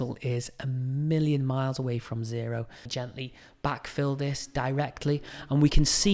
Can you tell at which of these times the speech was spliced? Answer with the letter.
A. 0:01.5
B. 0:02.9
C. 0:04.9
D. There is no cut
B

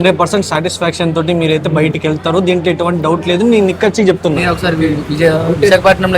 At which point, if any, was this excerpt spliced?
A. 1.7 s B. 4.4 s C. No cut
B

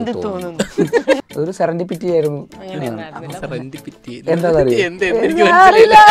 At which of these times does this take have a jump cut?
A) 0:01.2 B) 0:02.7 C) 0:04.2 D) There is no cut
A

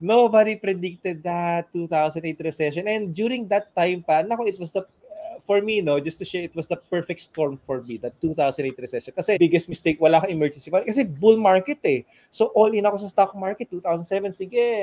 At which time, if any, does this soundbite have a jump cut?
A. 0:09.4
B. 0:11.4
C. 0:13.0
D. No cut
A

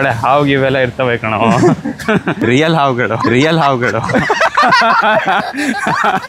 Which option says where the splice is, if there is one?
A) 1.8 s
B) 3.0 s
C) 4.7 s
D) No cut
D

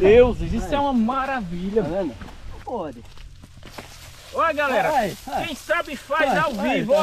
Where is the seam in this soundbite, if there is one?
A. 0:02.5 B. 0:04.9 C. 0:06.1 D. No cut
A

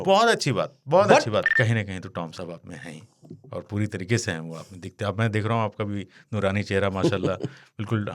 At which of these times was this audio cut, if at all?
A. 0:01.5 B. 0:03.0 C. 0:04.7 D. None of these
A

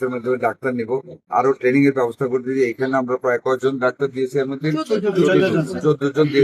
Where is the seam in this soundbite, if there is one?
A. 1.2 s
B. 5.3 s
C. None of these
A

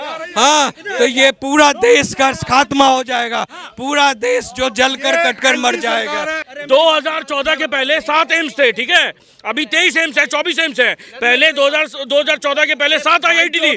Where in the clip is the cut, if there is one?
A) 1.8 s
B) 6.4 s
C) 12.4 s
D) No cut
B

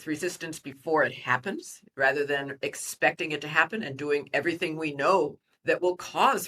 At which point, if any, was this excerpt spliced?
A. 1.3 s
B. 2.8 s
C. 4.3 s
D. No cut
D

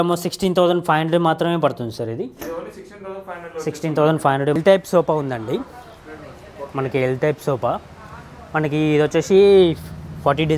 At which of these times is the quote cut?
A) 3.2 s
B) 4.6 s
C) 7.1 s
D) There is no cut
B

